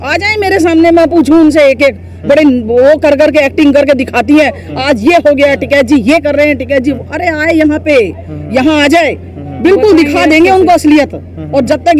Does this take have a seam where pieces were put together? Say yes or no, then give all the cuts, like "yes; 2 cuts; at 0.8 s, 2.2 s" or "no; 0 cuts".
no; 0 cuts